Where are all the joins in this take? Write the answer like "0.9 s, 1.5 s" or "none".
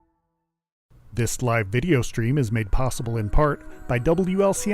1.1 s